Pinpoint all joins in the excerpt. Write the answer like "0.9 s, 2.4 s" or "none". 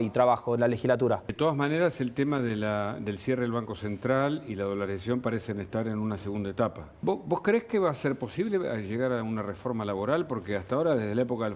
1.3 s, 6.9 s